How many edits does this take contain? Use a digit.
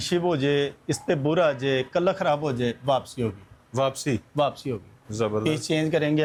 0